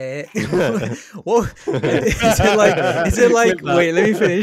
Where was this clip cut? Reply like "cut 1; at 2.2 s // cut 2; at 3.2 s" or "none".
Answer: none